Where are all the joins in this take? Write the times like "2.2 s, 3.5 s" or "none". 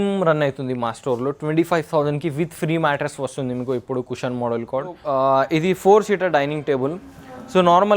5.0 s

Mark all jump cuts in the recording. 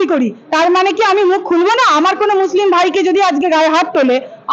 none

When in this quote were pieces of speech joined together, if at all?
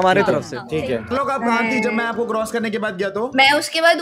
1.1 s

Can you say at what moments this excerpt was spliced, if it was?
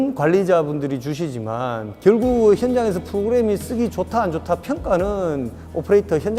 none

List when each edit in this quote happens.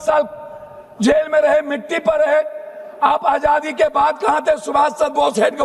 none

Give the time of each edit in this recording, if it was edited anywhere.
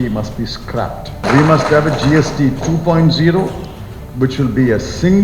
1.2 s

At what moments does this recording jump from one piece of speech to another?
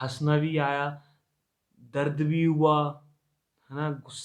none

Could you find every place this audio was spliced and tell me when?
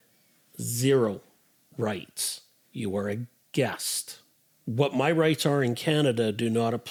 none

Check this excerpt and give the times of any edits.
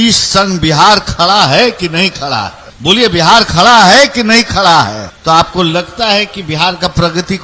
2.6 s, 5.1 s

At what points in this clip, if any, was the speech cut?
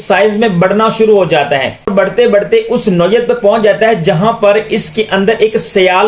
1.9 s

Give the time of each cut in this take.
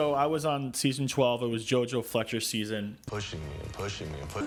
none

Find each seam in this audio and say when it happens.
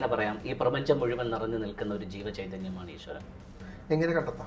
3.5 s

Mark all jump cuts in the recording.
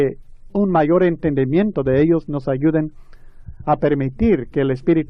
none

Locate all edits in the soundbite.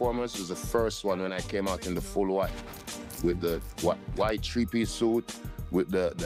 none

